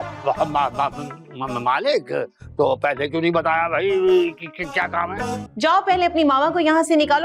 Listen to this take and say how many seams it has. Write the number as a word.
one